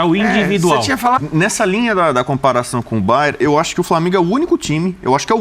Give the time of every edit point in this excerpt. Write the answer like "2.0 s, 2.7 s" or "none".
1.2 s

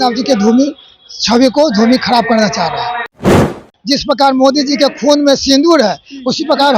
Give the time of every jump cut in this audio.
3.5 s

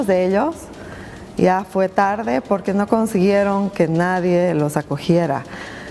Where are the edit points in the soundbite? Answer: 3.8 s

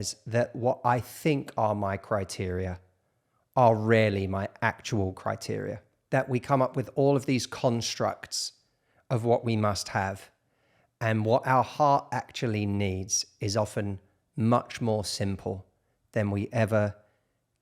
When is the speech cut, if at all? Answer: 6.0 s

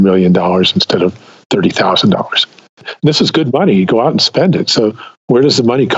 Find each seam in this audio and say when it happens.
2.9 s

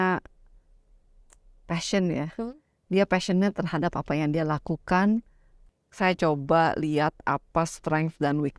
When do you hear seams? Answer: 5.6 s

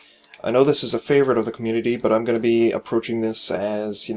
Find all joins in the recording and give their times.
3.0 s

